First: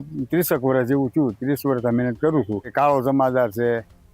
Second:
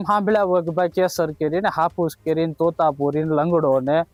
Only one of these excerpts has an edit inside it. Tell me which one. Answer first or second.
first